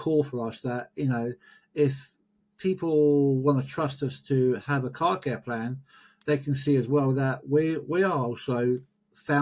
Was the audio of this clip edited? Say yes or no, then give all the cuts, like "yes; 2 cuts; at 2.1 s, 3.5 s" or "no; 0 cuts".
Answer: no; 0 cuts